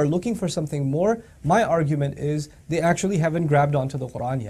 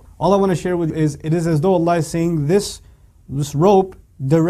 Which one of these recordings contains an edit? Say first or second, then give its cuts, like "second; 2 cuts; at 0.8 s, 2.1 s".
second; 1 cut; at 0.9 s